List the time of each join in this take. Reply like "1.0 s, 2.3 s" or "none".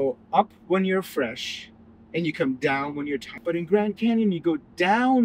3.3 s